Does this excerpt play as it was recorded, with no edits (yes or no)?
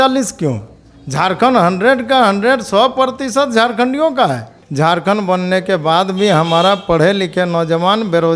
no